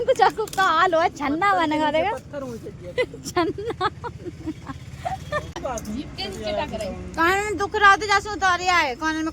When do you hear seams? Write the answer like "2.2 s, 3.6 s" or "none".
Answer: 5.6 s